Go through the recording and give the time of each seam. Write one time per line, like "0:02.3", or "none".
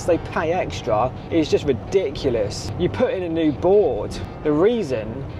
0:01.2
0:02.6
0:04.2